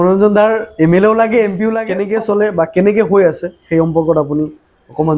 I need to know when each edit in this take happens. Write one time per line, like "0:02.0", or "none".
0:01.9